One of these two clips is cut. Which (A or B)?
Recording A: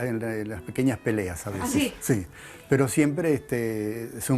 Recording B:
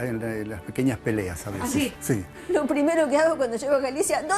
B